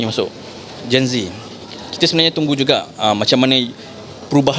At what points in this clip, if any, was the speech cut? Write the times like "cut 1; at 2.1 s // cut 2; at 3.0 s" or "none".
none